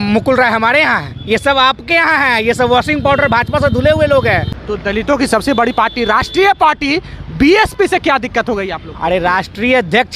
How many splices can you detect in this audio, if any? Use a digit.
1